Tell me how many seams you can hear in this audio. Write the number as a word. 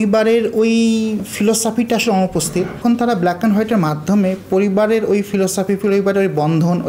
one